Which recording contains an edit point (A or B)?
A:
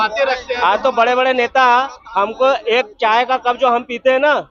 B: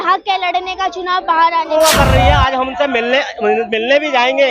B